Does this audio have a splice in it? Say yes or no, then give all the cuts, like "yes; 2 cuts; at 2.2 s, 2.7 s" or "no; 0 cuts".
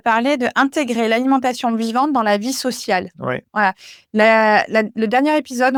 no; 0 cuts